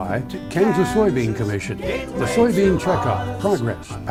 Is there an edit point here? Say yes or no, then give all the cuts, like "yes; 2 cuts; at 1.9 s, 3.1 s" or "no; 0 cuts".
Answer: no; 0 cuts